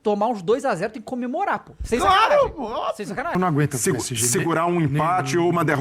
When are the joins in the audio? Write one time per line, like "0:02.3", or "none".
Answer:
0:03.3